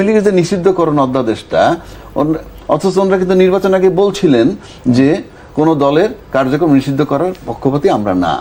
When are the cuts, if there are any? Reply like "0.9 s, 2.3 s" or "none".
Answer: none

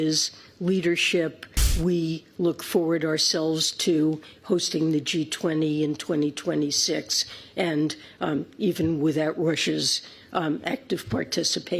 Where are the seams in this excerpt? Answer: 1.6 s

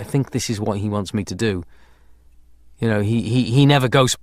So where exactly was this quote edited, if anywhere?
3.1 s

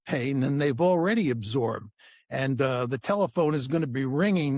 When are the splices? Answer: none

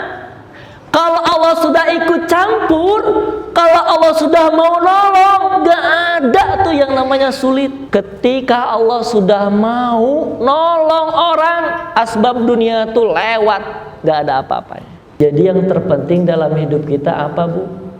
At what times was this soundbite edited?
7.8 s, 15.2 s

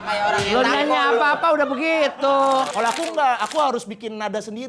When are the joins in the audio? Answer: 2.8 s

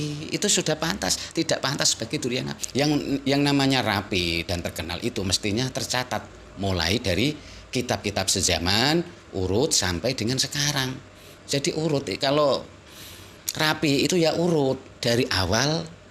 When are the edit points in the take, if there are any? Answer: 2.6 s

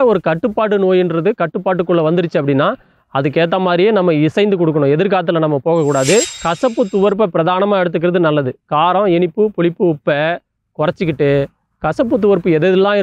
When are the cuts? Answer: 6.4 s

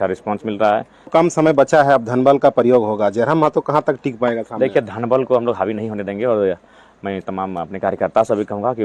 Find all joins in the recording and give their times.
1.1 s

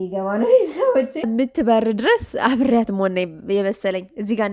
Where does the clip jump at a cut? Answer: 1.3 s

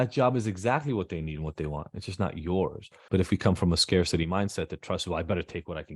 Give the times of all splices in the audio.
2.9 s

